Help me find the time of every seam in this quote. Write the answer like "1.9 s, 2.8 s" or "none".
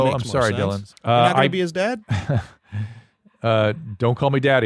0.9 s, 2.1 s